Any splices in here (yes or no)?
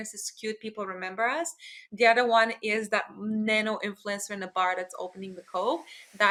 no